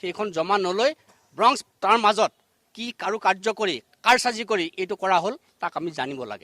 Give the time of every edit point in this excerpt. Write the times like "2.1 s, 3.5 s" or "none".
none

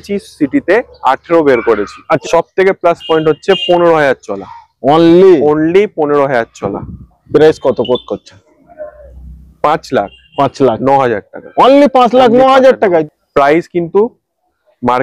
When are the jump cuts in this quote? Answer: 2.2 s, 13.0 s

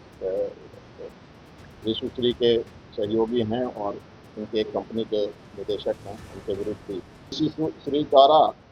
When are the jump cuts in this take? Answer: 7.3 s

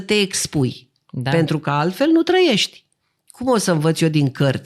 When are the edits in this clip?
none

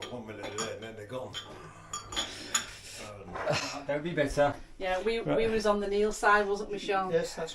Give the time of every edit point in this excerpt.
3.9 s

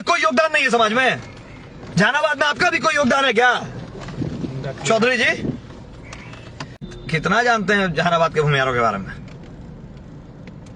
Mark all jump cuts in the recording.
6.9 s

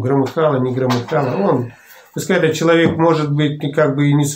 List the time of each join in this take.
none

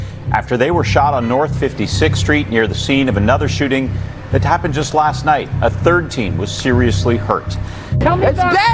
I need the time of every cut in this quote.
none

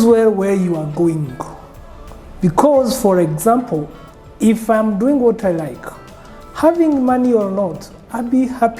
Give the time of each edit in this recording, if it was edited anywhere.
none

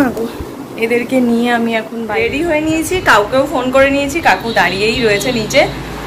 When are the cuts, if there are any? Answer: 2.1 s

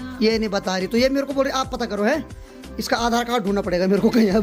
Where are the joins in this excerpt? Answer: none

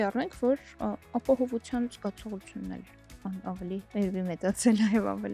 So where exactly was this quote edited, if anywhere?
none

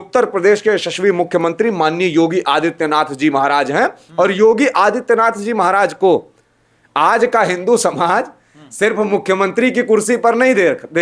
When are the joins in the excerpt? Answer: none

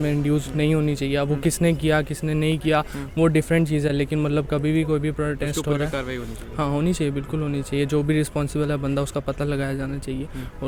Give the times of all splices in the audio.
none

